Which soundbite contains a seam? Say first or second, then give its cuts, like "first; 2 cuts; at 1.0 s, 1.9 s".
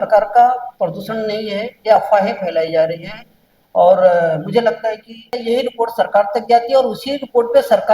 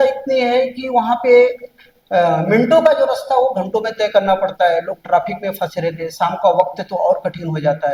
first; 1 cut; at 5.3 s